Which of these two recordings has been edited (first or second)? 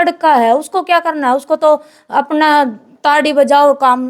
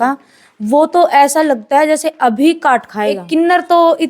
second